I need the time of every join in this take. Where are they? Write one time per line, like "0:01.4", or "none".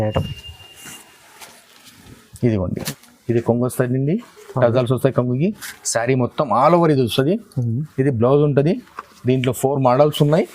0:02.8